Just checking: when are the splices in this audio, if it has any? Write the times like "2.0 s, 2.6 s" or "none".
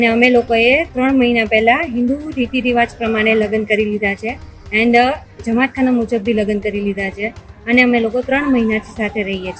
none